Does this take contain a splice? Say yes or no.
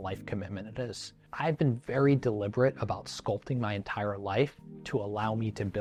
no